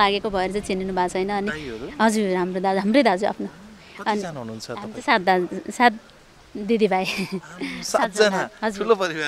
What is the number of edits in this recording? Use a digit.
0